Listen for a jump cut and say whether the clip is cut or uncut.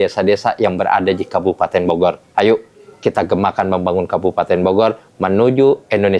uncut